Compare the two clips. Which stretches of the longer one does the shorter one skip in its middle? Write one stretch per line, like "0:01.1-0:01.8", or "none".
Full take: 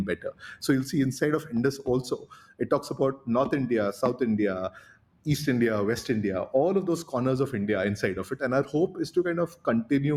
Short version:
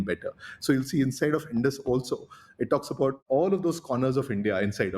0:03.2-0:06.5